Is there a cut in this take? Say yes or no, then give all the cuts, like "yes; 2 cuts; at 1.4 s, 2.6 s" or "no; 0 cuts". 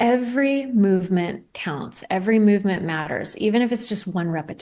no; 0 cuts